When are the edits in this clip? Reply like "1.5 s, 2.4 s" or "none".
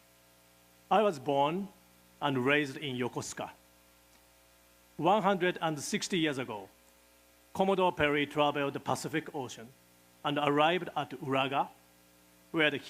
none